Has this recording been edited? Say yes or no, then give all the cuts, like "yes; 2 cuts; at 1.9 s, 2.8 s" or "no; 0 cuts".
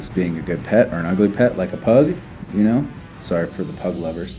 no; 0 cuts